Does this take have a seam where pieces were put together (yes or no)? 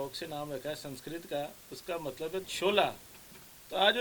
no